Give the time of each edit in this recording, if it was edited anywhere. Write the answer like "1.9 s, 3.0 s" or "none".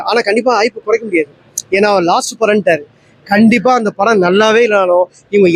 none